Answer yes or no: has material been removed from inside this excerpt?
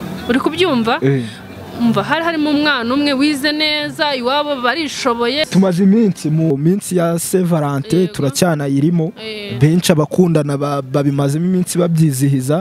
yes